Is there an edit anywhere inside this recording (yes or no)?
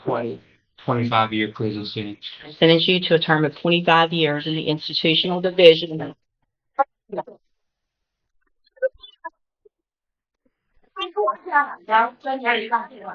yes